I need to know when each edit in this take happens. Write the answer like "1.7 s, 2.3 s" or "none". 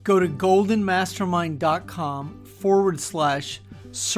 none

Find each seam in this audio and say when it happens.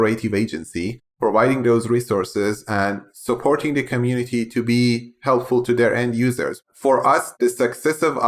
1.0 s, 6.6 s

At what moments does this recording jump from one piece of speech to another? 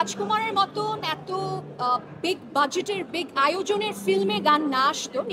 none

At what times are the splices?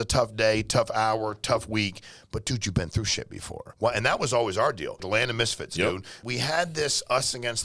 3.7 s, 5.0 s, 6.2 s

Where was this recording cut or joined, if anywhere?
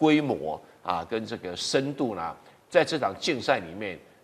none

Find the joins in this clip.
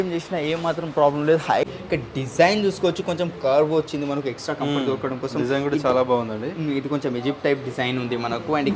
1.7 s

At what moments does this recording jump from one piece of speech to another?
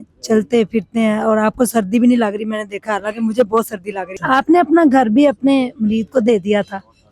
4.1 s

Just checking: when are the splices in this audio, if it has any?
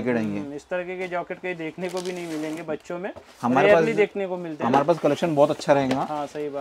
none

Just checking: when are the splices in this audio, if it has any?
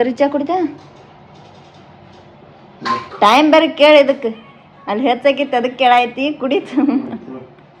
none

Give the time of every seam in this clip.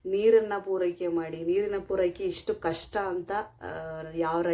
none

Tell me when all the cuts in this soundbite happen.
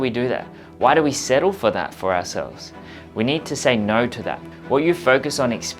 4.5 s

